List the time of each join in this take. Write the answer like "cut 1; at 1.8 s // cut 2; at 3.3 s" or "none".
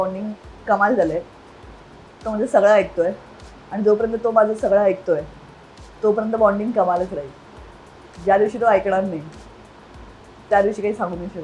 none